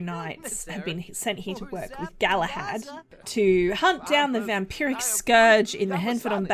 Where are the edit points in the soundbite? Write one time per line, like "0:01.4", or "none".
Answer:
0:03.0